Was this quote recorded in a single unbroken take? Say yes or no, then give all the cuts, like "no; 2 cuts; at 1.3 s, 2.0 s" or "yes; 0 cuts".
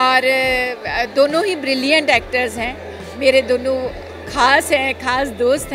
yes; 0 cuts